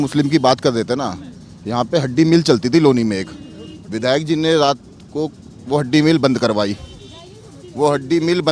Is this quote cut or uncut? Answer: uncut